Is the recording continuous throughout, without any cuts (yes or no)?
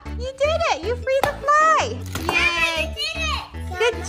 no